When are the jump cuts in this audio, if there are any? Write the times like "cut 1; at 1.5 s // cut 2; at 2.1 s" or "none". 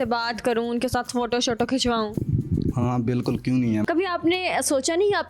cut 1; at 3.8 s